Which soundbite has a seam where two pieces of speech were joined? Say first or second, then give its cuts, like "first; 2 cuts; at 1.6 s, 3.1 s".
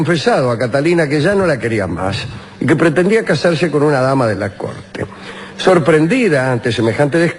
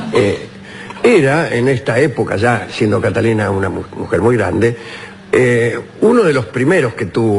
first; 1 cut; at 1.1 s